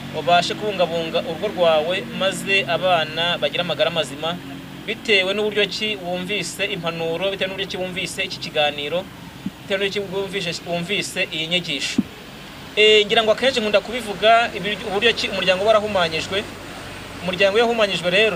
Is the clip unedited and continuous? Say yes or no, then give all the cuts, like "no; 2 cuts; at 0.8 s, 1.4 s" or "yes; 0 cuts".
yes; 0 cuts